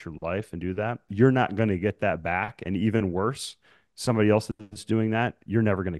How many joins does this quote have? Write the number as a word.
one